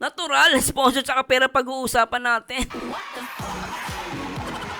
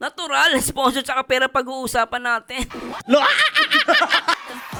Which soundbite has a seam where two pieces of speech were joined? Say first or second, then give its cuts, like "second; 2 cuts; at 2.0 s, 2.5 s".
first; 1 cut; at 3.0 s